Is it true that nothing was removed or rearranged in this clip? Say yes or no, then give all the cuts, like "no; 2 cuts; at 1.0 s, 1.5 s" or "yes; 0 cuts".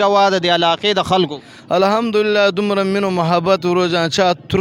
yes; 0 cuts